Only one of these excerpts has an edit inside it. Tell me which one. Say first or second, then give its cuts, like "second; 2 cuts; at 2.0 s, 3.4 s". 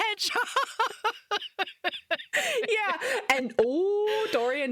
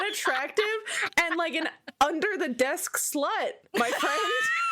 second; 1 cut; at 3.6 s